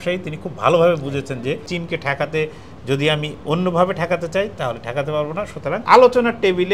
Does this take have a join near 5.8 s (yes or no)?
yes